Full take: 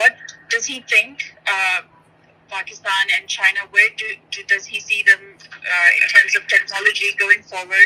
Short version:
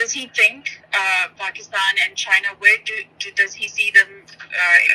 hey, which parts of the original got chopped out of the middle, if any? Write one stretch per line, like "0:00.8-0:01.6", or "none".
0:01.8-0:02.4